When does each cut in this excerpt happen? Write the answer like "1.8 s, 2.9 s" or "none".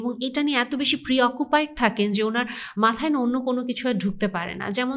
none